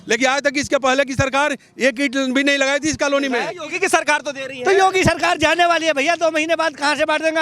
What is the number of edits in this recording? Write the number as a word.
one